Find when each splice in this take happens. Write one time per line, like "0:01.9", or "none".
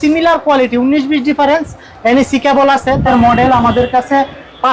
0:03.1